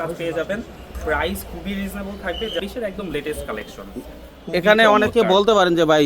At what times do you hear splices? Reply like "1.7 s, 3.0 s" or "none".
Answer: 2.6 s